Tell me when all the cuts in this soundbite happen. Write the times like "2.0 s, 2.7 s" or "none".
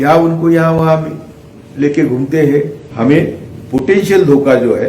2.8 s